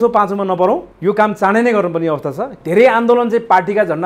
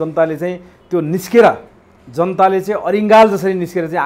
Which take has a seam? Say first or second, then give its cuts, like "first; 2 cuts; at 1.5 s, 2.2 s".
first; 2 cuts; at 0.9 s, 2.6 s